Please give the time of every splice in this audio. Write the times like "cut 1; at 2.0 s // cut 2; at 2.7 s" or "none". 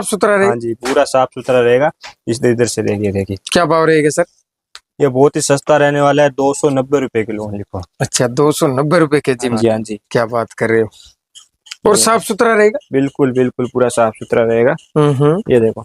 cut 1; at 9.5 s